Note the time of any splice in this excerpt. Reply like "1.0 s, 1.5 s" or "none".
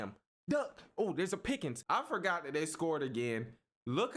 1.8 s